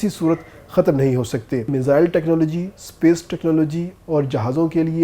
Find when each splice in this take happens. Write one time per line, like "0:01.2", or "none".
0:01.7